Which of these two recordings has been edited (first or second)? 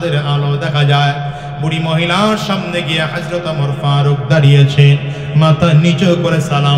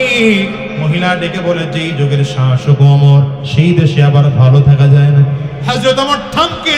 second